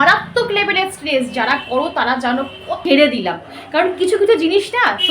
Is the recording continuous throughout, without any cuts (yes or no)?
no